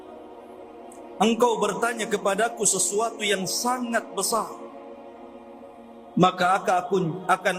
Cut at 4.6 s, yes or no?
yes